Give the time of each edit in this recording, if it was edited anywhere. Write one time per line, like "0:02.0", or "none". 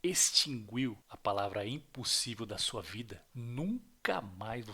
0:01.1
0:03.2